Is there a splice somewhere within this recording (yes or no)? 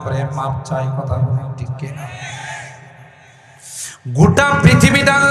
no